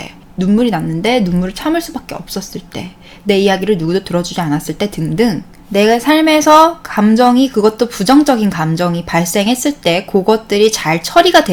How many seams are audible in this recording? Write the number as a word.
zero